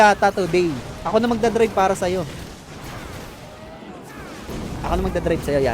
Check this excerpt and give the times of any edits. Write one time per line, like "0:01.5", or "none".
0:04.5